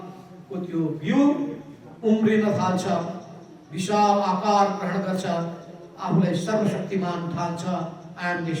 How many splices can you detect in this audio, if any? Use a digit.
0